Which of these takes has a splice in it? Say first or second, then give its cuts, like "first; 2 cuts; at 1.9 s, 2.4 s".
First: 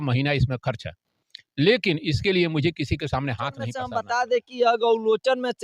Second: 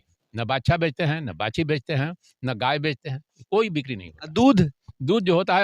first; 1 cut; at 3.9 s